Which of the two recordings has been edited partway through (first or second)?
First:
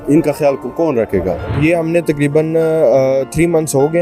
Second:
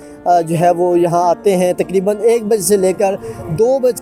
first